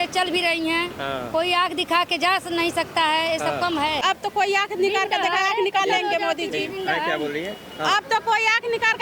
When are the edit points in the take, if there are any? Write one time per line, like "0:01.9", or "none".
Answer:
0:04.0